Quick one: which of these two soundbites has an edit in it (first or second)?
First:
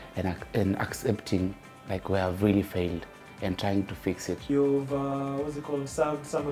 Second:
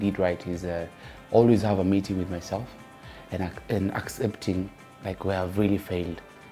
first